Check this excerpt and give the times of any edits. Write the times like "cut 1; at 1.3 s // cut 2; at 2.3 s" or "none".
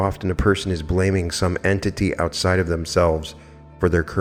none